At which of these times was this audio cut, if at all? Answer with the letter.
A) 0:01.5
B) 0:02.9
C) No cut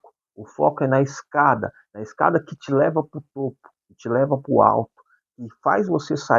C